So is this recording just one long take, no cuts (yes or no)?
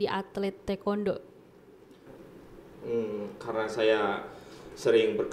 no